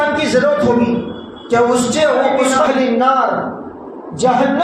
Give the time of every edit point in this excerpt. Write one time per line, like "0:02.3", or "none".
0:02.6